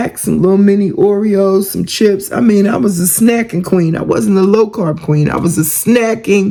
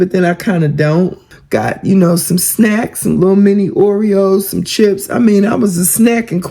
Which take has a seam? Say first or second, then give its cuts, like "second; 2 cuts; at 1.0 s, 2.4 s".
second; 1 cut; at 1.3 s